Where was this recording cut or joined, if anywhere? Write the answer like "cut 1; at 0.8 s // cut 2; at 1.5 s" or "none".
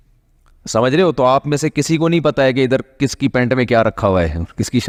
none